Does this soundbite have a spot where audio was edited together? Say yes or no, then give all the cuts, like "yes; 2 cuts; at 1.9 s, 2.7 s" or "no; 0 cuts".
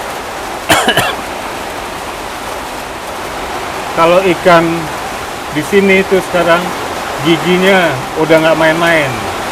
no; 0 cuts